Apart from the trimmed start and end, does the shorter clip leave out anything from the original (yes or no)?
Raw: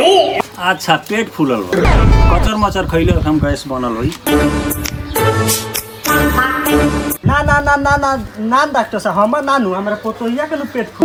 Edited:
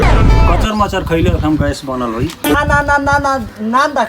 yes